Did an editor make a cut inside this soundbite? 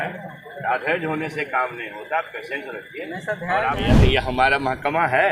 yes; 1 cut; at 3.8 s

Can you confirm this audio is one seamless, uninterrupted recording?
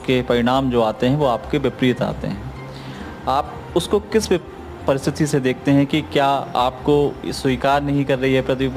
yes; 0 cuts

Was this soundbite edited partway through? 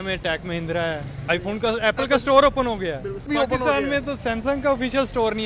yes; 2 cuts; at 1.2 s, 3.2 s

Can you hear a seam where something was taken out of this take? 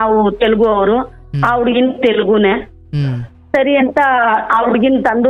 no; 0 cuts

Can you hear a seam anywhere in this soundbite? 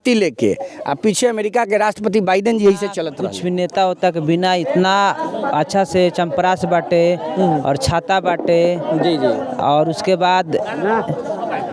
yes; 1 cut; at 3.1 s

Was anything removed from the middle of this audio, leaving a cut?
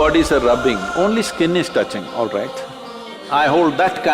yes; 1 cut; at 3.2 s

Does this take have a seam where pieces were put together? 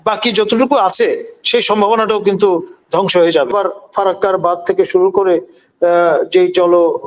yes; 1 cut; at 3.5 s

